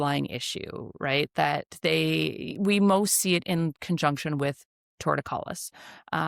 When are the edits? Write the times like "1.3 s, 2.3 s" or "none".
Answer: none

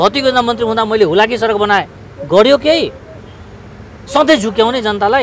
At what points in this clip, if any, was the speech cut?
none

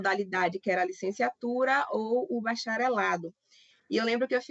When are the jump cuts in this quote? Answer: none

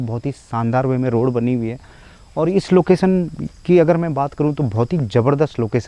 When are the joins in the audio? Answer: none

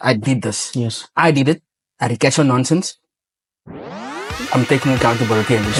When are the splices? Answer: none

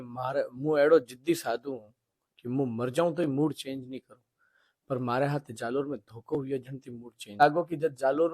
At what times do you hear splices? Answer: 7.4 s

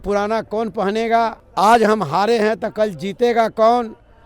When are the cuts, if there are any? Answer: 1.4 s

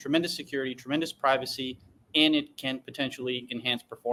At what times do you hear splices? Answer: none

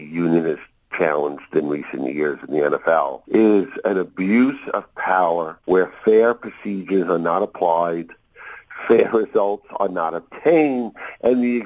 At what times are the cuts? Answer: 3.2 s, 5.5 s

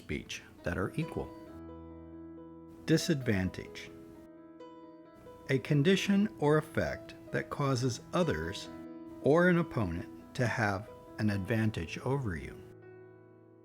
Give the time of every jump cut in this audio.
3.7 s, 5.1 s, 12.7 s

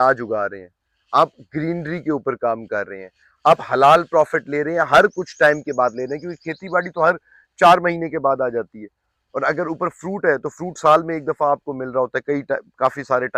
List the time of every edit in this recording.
none

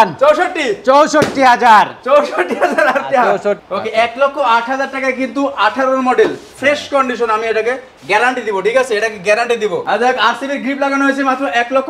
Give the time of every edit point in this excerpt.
3.6 s, 9.8 s

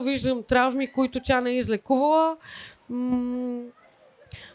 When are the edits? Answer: none

